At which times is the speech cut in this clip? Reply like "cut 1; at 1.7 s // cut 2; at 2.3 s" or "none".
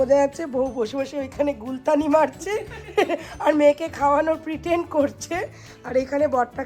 none